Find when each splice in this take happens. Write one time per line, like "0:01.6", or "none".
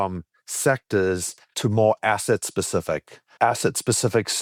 none